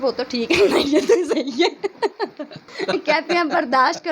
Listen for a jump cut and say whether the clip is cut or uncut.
cut